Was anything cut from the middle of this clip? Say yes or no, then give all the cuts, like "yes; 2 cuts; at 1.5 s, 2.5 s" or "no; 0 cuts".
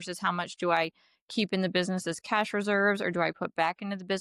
no; 0 cuts